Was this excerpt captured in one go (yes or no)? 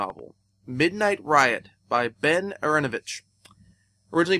yes